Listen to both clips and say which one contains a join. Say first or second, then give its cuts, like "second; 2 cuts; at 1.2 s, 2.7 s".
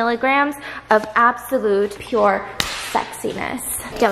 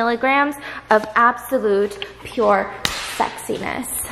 first; 1 cut; at 2.0 s